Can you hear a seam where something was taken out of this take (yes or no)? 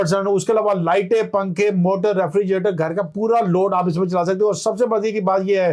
no